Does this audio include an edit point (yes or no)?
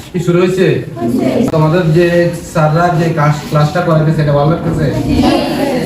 yes